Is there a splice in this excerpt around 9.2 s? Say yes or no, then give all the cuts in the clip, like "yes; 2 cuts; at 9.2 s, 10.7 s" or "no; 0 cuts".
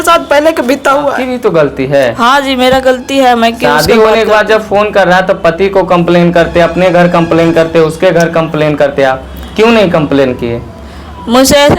no; 1 cut; at 1.3 s